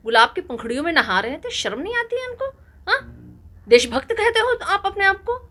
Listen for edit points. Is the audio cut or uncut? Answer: uncut